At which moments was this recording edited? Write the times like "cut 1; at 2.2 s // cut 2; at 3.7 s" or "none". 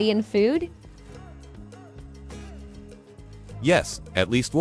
none